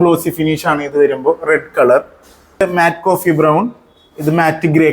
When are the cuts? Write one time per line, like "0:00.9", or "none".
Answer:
0:02.6